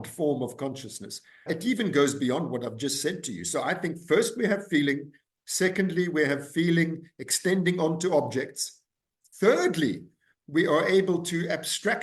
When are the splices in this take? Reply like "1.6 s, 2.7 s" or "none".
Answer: 1.4 s